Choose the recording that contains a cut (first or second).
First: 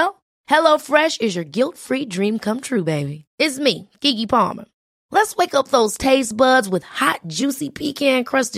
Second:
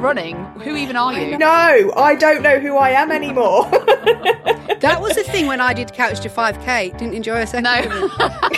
second